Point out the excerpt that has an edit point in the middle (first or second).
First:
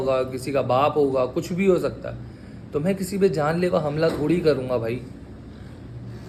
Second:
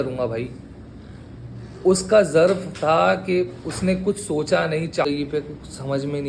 second